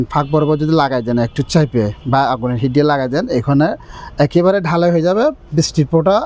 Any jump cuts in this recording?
no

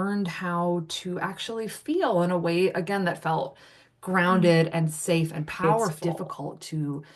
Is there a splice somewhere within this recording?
yes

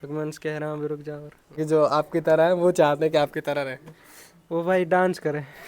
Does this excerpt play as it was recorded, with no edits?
no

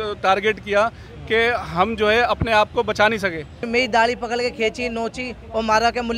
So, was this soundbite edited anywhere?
yes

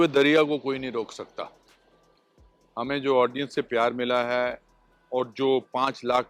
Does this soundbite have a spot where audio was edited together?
no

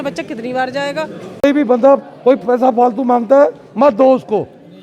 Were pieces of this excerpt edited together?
yes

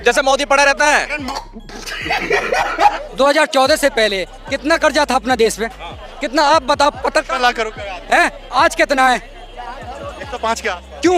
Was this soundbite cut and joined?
yes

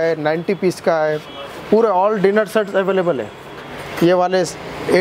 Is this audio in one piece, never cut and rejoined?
yes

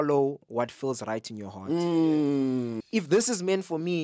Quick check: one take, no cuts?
no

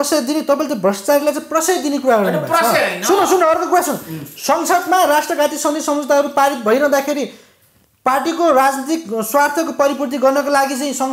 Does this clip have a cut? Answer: no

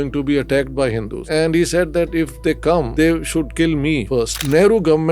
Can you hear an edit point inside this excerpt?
yes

